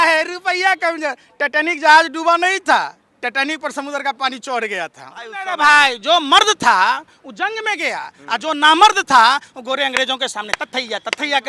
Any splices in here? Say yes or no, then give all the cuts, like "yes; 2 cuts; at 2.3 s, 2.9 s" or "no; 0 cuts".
yes; 1 cut; at 5.5 s